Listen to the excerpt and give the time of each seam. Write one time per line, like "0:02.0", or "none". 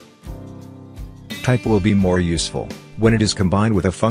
0:01.4